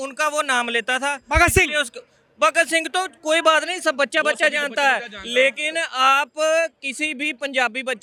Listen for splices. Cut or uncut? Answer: uncut